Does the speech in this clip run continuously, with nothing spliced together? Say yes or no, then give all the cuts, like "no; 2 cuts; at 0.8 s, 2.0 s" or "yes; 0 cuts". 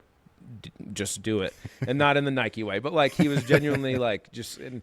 yes; 0 cuts